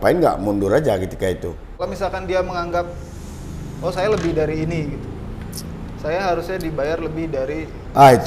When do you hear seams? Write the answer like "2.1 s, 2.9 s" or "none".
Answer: 1.5 s